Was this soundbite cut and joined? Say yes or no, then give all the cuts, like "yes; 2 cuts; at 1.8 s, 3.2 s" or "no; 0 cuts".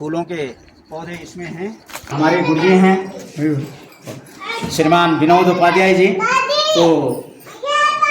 yes; 1 cut; at 2.0 s